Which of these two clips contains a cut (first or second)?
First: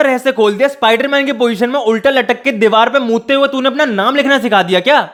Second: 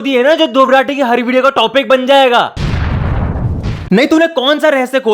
second